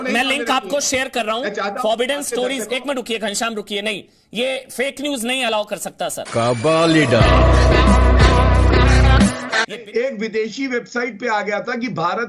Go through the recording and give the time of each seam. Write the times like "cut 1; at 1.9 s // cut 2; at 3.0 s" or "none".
cut 1; at 9.7 s